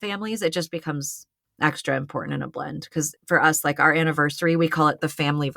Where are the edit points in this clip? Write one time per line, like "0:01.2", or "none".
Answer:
0:03.1

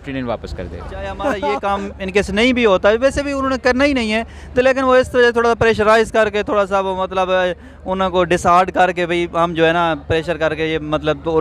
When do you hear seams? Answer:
0:01.5

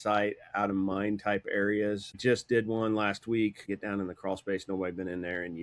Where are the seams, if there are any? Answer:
0:02.2
0:03.6

